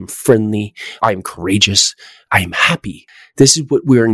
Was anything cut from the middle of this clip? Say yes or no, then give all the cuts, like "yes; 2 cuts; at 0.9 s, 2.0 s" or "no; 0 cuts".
yes; 1 cut; at 3.1 s